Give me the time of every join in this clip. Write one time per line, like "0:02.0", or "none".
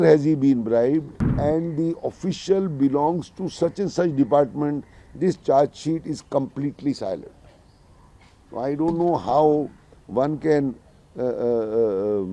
0:01.2